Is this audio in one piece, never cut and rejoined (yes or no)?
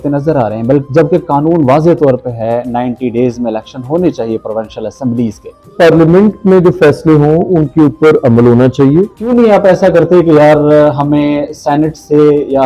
no